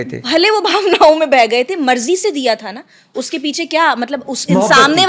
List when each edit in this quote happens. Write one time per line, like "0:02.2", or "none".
none